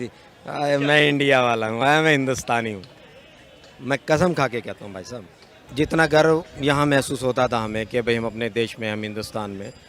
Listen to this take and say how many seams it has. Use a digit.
1